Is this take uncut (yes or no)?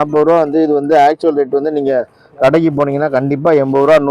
yes